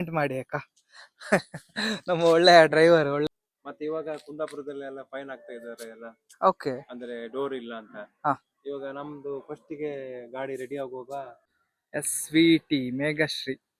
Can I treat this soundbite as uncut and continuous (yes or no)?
no